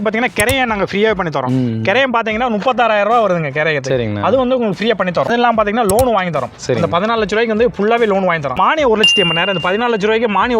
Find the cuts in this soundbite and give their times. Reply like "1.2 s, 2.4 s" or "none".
5.6 s, 8.6 s